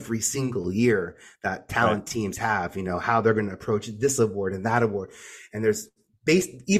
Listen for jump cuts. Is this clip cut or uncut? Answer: uncut